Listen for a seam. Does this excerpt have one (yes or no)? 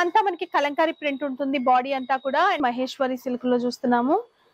yes